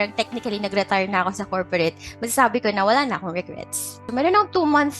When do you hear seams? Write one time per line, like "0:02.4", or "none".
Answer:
0:04.0

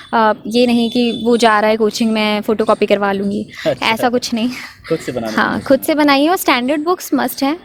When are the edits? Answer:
none

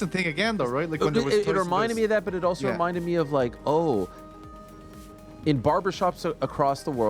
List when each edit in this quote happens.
none

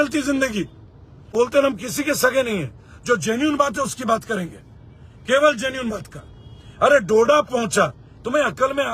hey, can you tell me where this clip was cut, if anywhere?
0:01.3

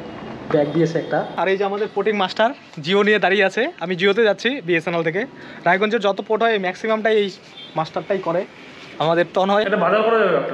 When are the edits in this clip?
0:01.3
0:09.7

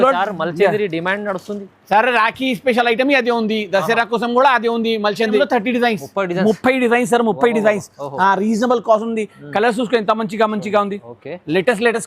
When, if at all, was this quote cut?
0:05.4

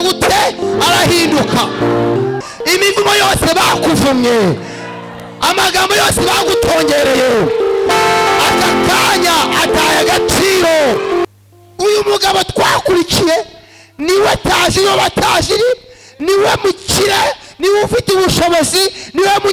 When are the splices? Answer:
0:02.4
0:11.2

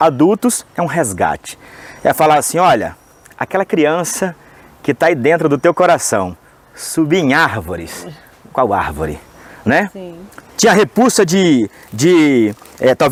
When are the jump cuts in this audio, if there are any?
none

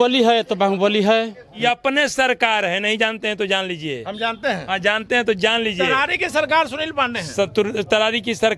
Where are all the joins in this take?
0:01.5

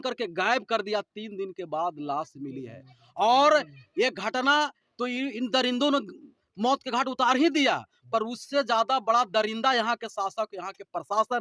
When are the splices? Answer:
none

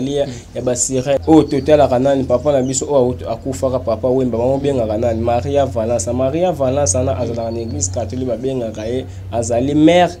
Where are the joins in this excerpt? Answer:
0:01.2

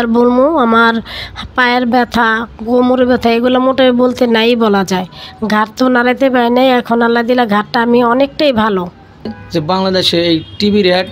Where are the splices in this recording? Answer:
0:09.4

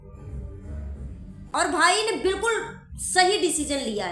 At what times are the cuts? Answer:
0:01.4

